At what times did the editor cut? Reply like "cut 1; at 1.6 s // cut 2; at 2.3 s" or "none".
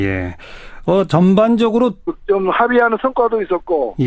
none